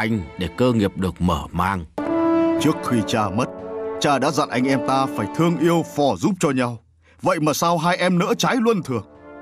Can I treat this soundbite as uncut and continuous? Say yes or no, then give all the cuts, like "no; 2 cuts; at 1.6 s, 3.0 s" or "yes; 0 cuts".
no; 1 cut; at 1.9 s